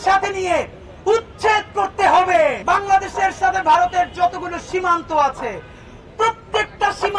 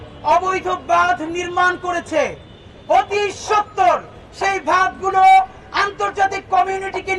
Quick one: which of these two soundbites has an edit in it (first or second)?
first